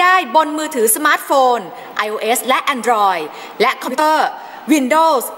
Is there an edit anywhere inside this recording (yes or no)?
yes